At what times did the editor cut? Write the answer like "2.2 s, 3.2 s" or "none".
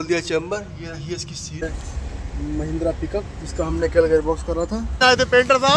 1.6 s, 5.0 s